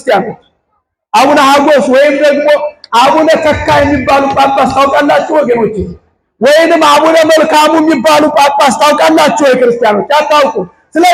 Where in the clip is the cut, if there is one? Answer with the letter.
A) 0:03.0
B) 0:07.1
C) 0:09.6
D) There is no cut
D